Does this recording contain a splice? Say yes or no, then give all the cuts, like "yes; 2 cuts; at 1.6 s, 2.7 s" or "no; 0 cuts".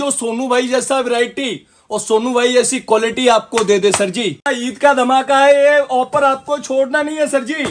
yes; 1 cut; at 4.5 s